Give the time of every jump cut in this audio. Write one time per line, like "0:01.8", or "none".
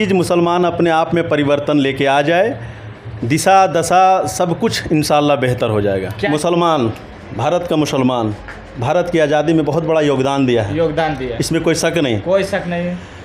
0:06.2